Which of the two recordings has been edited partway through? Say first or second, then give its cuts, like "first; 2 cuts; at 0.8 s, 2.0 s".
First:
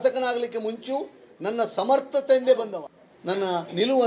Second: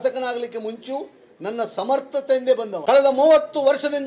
first; 1 cut; at 2.7 s